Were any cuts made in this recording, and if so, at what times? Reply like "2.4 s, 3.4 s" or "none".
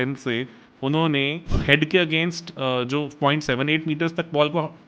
1.5 s